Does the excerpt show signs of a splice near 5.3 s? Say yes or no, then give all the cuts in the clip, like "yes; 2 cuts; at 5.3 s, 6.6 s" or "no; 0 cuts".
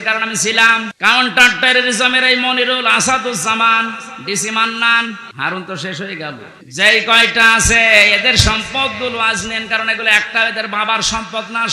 yes; 3 cuts; at 0.9 s, 5.3 s, 6.5 s